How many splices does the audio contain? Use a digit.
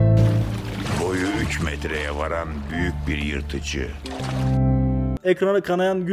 1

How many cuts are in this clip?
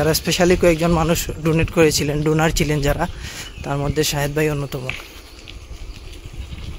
0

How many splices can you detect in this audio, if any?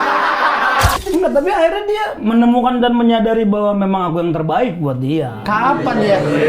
1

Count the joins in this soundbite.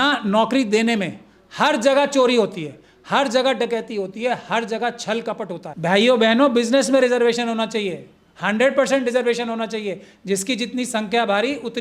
1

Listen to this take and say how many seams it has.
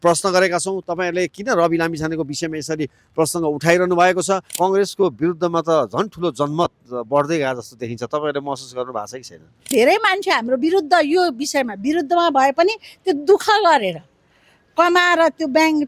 2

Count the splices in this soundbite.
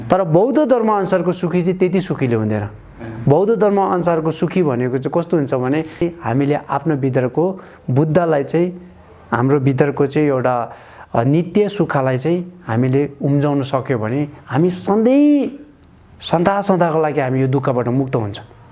1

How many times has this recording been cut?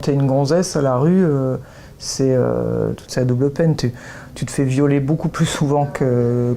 0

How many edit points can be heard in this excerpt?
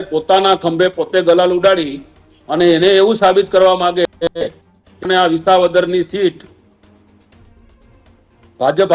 0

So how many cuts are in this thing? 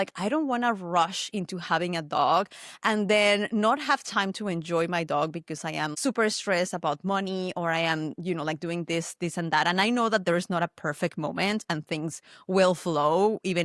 1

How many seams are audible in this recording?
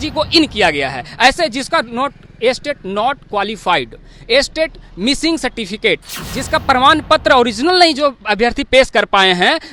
0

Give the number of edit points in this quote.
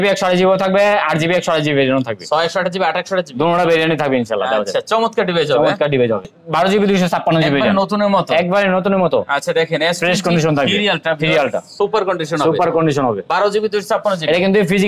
1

